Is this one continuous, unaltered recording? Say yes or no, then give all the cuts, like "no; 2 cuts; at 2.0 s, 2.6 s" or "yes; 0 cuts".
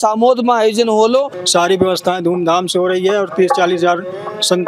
no; 1 cut; at 1.4 s